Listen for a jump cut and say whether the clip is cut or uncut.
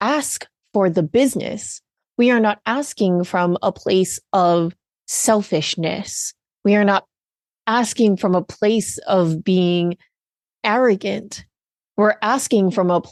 uncut